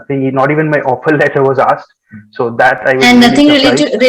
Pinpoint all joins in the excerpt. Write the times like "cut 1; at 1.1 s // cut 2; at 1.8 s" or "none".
none